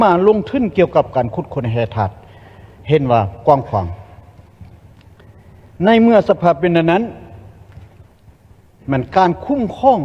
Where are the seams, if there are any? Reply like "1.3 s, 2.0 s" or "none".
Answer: none